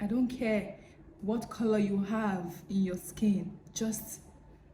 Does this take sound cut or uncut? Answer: uncut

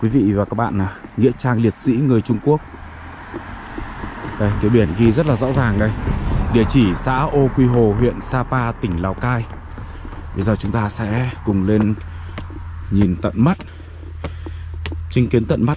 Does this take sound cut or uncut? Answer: uncut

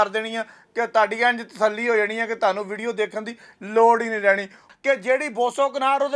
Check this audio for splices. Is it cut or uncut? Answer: cut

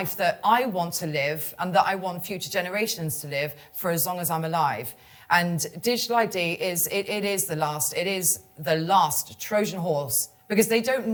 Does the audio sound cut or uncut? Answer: uncut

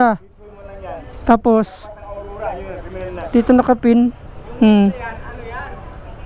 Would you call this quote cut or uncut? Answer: cut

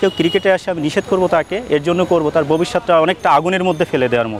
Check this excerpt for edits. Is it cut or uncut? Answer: uncut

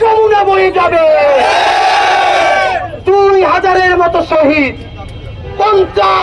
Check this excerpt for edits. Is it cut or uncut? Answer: uncut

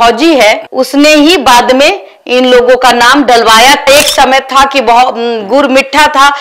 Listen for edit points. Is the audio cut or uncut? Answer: cut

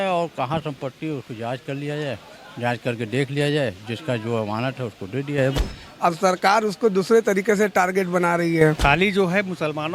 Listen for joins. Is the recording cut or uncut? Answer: cut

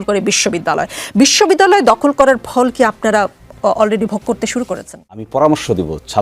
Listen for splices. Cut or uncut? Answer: cut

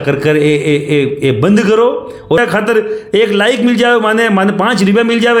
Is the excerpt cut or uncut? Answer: cut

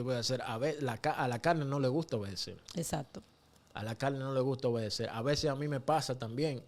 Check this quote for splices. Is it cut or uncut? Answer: uncut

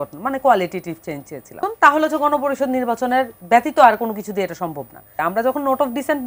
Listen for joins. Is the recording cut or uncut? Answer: cut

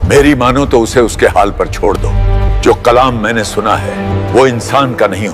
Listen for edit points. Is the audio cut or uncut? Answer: cut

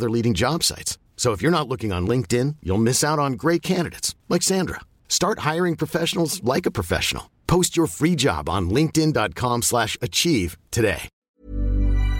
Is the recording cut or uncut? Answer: cut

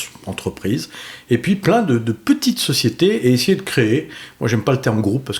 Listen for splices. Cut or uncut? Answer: uncut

